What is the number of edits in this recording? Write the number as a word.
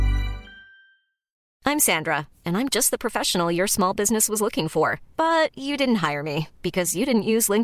one